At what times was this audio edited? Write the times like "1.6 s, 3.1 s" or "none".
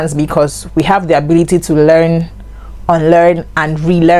none